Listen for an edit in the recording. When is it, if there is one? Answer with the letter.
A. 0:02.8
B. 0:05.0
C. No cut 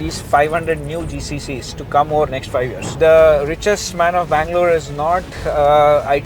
A